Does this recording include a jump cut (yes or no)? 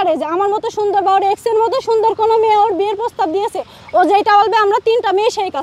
no